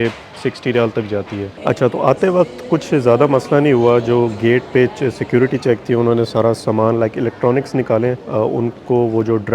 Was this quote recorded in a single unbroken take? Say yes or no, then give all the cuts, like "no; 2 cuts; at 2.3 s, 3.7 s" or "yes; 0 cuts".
no; 1 cut; at 1.5 s